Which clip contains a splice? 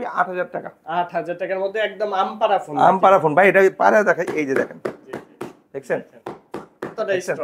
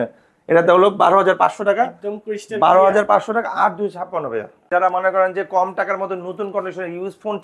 second; 1 cut; at 4.7 s

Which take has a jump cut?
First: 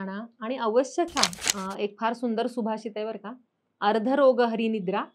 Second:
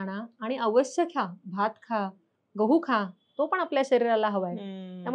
first; 1 cut; at 1.4 s

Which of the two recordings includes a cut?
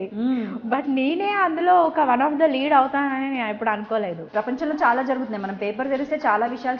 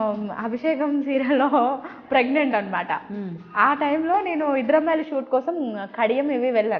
first; 1 cut; at 4.2 s

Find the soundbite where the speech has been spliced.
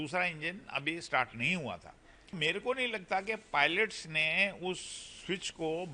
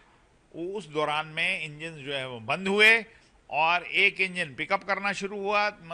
first; 1 cut; at 2.4 s

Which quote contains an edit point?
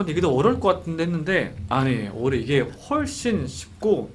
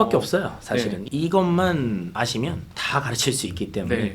second; 1 cut; at 2.6 s

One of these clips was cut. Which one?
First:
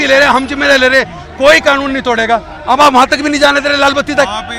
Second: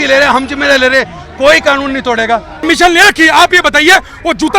second; 1 cut; at 2.6 s

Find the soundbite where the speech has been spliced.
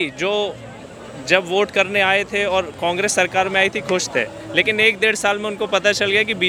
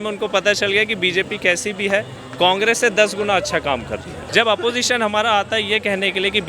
second; 1 cut; at 4.2 s

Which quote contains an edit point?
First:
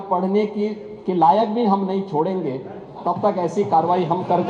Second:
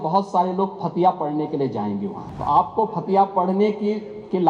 second; 1 cut; at 2.2 s

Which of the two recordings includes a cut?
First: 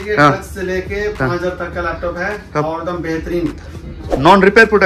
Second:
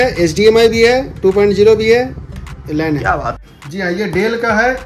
second; 1 cut; at 3.4 s

